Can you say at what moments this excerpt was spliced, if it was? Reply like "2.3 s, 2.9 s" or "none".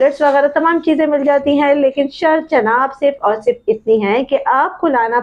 none